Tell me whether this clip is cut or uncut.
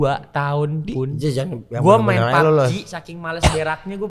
uncut